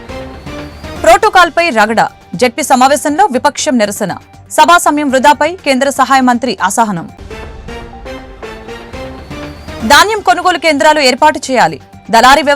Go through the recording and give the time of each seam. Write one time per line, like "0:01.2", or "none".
0:00.9